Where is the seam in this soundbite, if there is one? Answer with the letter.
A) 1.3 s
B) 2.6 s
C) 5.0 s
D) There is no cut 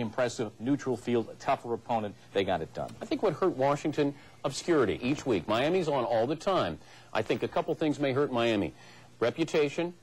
C